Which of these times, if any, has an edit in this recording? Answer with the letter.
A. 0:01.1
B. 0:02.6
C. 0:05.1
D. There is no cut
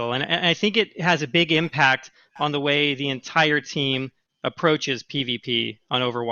C